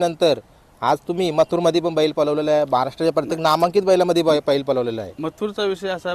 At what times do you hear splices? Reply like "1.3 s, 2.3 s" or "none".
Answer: none